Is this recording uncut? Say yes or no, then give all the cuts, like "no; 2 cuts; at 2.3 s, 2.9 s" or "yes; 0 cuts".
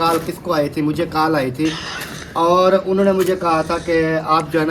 yes; 0 cuts